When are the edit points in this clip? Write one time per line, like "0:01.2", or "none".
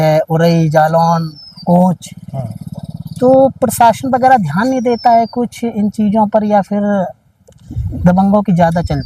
none